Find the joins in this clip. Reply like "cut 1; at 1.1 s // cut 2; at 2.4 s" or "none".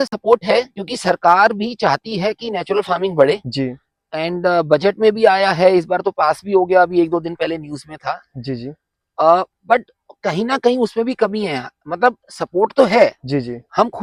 none